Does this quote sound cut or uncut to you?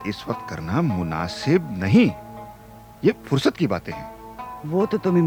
uncut